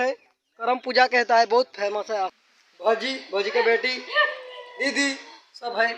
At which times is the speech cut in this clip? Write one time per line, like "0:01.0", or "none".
0:02.3